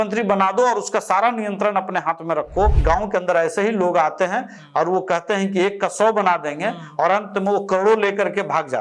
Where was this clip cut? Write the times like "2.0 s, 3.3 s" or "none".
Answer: 2.8 s

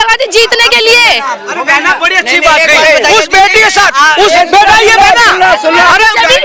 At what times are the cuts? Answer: none

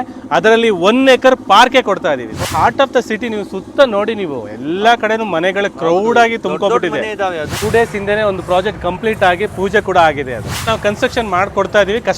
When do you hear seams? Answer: 2.5 s, 7.6 s, 10.6 s

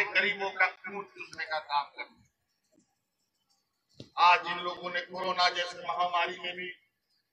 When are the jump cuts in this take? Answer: none

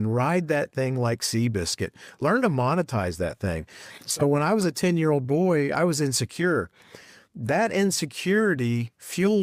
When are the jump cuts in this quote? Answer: none

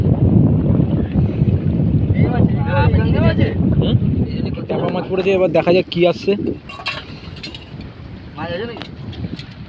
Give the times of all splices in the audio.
4.8 s

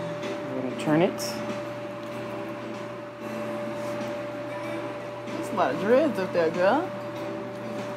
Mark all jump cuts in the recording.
none

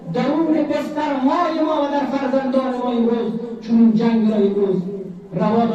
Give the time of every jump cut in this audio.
none

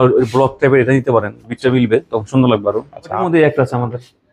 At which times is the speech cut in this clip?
3.2 s

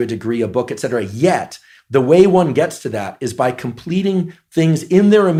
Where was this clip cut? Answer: none

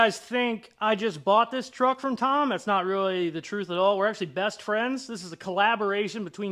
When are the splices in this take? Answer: none

